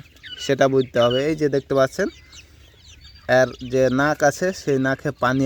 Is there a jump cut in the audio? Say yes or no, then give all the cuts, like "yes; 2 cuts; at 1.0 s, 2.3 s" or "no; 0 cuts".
no; 0 cuts